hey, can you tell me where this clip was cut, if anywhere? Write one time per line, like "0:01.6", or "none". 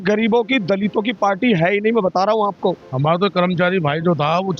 0:02.9